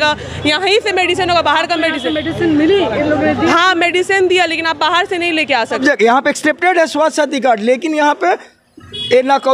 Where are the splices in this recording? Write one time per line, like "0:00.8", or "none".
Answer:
0:05.8